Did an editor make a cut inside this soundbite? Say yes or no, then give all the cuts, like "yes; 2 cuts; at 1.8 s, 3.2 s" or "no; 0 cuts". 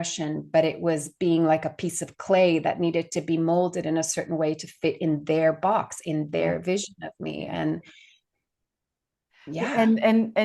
no; 0 cuts